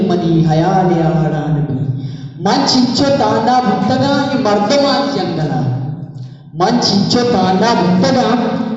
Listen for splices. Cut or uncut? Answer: uncut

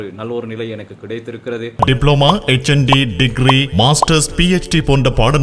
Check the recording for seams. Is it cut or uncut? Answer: cut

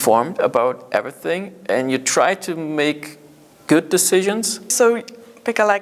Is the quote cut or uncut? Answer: cut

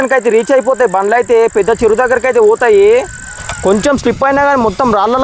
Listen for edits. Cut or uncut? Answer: cut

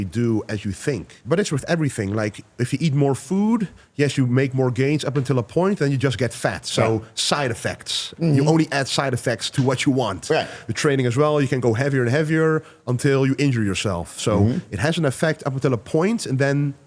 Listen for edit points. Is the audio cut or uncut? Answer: cut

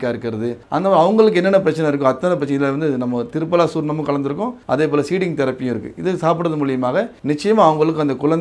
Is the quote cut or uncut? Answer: uncut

